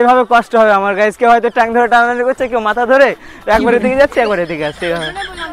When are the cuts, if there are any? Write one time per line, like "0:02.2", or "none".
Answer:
none

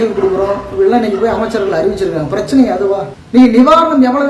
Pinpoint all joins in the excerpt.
0:03.1

